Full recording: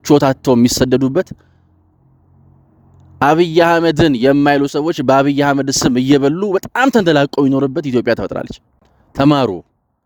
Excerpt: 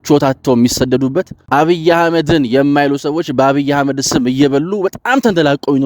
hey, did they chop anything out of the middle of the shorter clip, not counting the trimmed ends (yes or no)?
yes